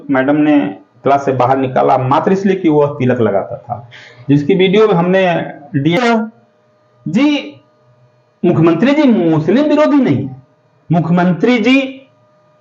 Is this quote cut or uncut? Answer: cut